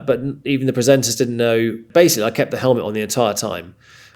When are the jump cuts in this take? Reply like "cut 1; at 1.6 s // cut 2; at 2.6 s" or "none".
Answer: cut 1; at 1.8 s

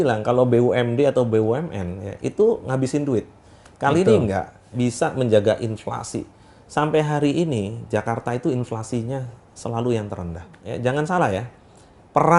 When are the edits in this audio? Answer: cut 1; at 4.6 s // cut 2; at 10.6 s

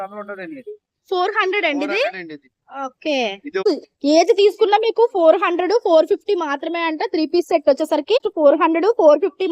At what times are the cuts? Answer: cut 1; at 3.6 s // cut 2; at 8.2 s

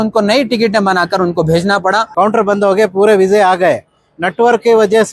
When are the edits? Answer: cut 1; at 2.1 s

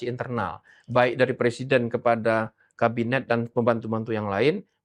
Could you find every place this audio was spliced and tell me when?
none

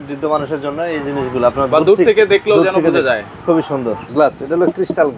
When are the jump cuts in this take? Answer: cut 1; at 4.0 s

